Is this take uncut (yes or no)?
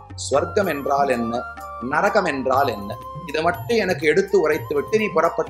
yes